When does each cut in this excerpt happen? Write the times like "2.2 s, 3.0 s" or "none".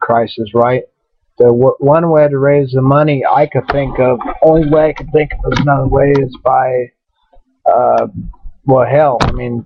none